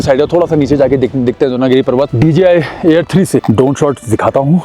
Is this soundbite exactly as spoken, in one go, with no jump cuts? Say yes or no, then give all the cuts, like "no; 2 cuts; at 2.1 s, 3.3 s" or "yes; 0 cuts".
no; 2 cuts; at 2.1 s, 3.4 s